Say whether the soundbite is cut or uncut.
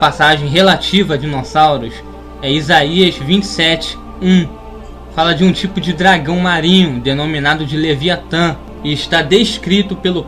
cut